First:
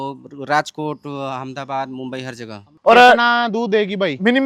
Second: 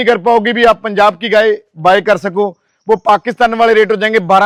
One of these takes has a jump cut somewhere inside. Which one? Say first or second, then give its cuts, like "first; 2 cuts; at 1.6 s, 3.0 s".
first; 1 cut; at 2.6 s